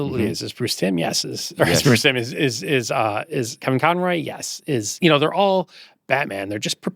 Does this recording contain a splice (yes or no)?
no